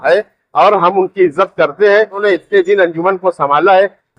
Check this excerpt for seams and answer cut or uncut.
cut